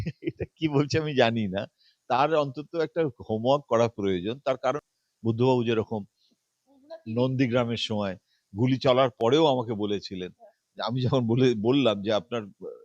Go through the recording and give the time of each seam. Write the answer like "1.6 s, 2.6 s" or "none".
4.8 s